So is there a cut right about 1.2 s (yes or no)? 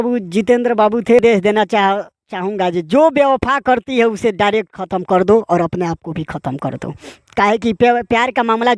yes